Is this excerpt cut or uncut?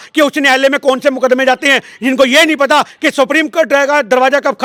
uncut